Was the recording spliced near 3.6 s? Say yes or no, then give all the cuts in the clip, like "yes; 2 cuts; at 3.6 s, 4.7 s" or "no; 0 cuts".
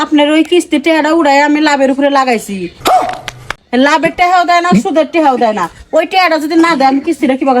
yes; 2 cuts; at 2.7 s, 3.6 s